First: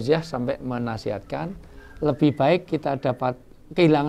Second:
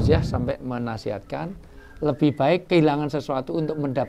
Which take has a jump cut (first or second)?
second